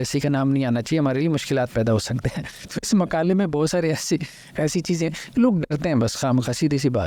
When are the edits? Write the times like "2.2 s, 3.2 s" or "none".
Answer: none

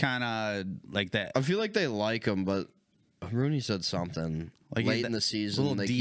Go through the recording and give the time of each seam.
none

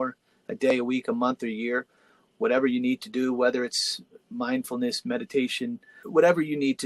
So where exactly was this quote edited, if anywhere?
5.9 s

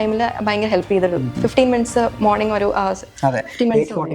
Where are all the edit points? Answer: none

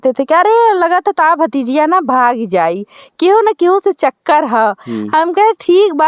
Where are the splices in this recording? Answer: none

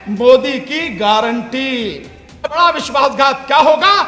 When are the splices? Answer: 2.5 s

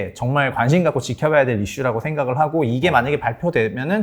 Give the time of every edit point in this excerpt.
none

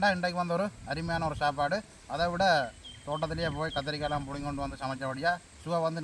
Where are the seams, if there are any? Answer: none

